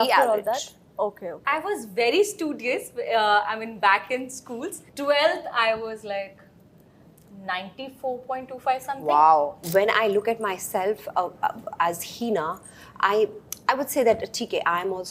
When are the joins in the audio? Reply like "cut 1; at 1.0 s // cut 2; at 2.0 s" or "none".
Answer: cut 1; at 9.6 s